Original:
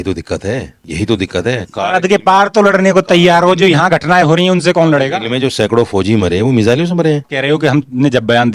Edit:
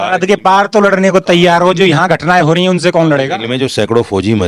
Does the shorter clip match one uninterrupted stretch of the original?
yes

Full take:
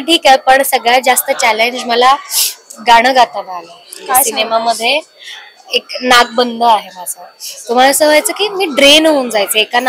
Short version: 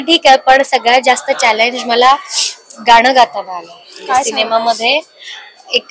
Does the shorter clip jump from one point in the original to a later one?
no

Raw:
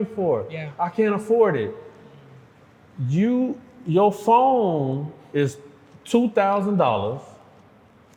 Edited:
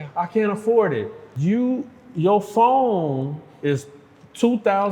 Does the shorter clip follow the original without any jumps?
no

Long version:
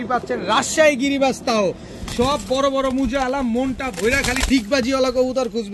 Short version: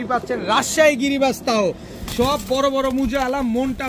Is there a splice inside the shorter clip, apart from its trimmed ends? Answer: no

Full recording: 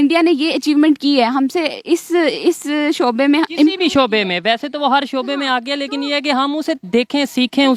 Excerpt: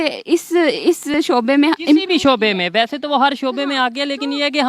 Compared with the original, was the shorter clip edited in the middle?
yes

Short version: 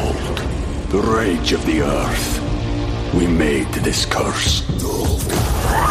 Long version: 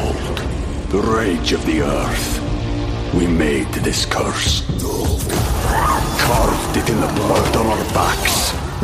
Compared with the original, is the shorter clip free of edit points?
yes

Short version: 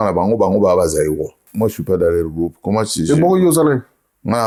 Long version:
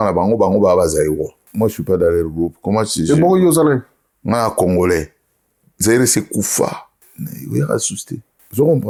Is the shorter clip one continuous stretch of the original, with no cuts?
yes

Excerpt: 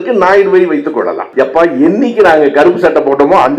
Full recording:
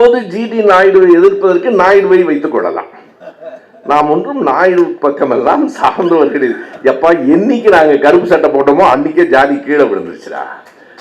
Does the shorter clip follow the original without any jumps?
no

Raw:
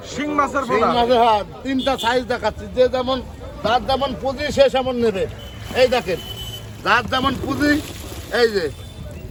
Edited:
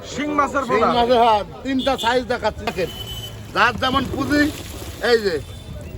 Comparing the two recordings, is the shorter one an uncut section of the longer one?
no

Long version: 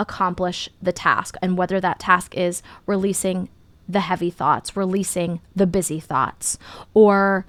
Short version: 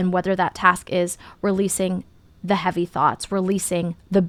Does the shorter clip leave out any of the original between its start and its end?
no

